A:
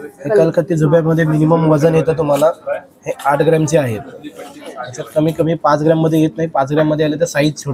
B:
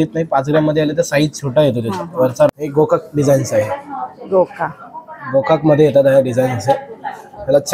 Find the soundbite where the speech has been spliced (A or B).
B